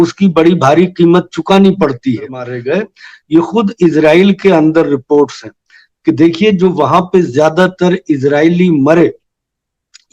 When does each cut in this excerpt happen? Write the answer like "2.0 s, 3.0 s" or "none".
2.5 s